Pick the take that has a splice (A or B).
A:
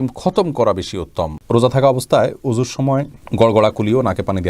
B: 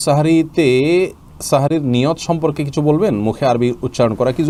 A